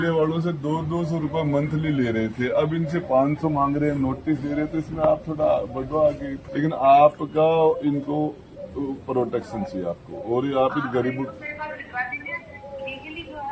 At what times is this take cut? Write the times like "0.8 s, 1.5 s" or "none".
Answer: 6.4 s

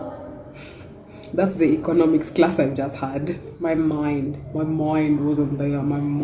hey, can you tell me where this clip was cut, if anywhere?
3.5 s

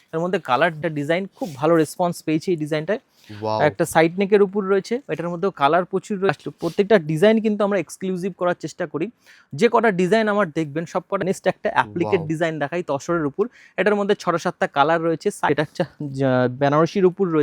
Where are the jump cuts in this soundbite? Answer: 0.8 s, 6.3 s, 11.2 s, 15.5 s

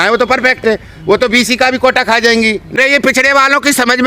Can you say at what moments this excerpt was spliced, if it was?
2.7 s

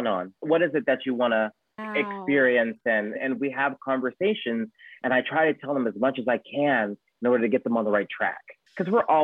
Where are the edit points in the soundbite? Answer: none

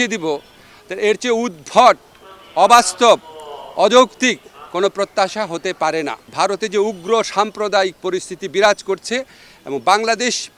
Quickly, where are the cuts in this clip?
6.2 s

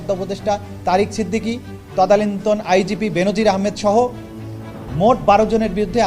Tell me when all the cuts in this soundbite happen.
4.2 s

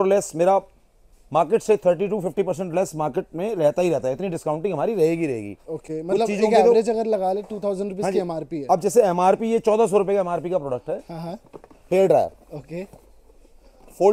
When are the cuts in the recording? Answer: none

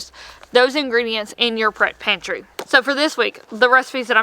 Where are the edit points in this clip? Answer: 2.5 s

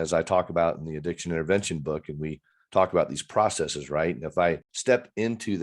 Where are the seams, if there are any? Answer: 4.7 s

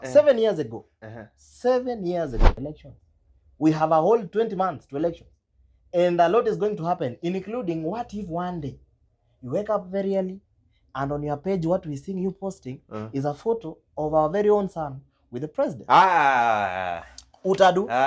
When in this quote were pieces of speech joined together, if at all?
2.5 s

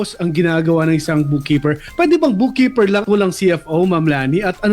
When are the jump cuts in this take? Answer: 3.0 s

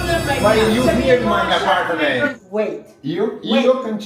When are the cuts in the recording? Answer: 0.9 s, 2.4 s

